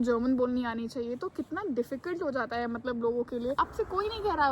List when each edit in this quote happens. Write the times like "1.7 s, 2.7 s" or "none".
3.6 s